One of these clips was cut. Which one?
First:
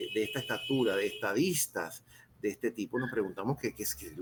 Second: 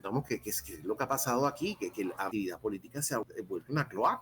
second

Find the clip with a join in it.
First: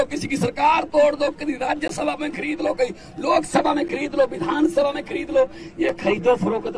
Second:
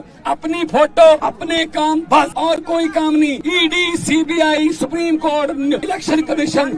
second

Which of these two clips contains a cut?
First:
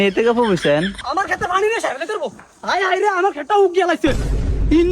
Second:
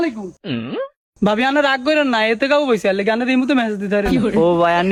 first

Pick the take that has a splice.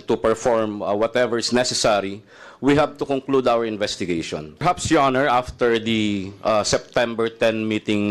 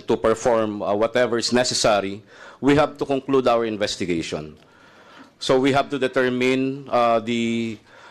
first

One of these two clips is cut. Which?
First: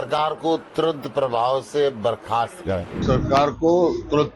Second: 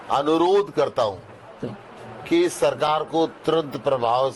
first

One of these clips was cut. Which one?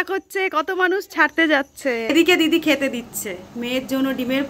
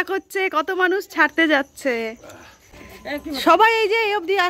first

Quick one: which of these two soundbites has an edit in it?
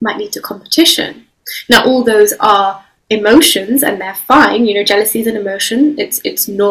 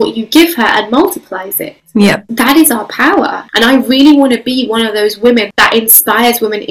second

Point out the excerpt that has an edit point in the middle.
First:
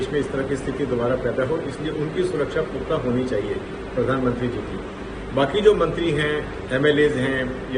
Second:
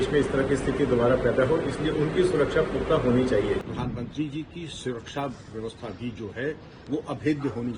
second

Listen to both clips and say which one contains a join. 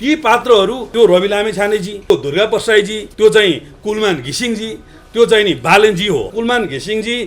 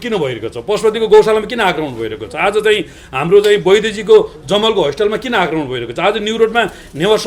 first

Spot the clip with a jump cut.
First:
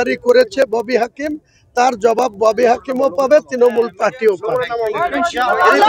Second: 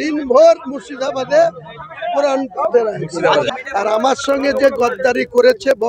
second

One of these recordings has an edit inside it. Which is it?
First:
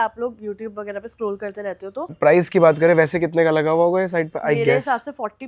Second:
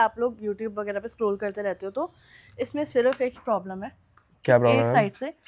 first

